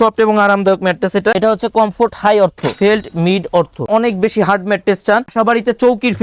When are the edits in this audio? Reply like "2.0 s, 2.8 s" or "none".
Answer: 1.4 s, 2.8 s, 3.9 s, 5.3 s